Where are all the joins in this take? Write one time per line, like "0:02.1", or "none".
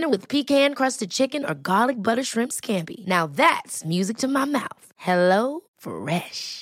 none